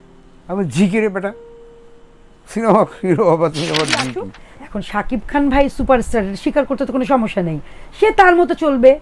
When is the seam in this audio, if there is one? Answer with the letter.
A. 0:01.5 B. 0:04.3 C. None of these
B